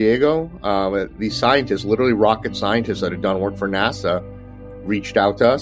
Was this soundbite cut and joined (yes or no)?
no